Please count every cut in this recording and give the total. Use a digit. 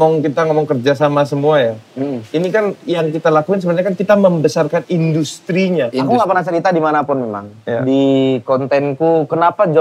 1